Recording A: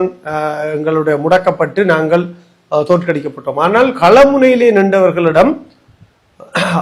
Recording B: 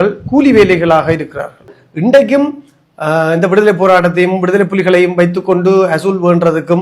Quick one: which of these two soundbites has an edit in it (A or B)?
B